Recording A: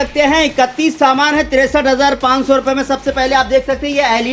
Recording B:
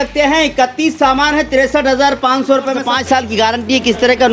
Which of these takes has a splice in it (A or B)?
B